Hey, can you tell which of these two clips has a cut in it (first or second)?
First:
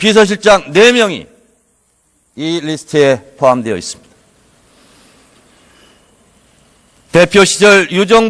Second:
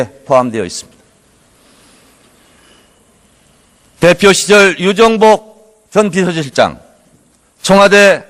first